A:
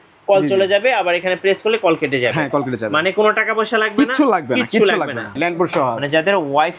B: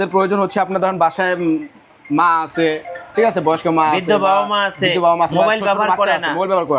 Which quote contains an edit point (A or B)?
A